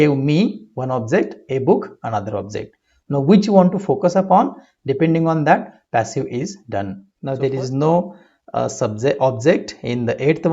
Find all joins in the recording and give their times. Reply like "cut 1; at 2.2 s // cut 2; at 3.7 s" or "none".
cut 1; at 7.1 s